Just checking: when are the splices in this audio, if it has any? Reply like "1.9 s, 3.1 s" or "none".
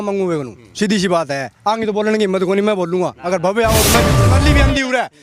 4.2 s